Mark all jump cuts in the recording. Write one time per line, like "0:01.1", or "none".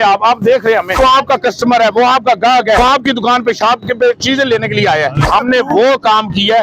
0:01.0
0:02.8
0:05.2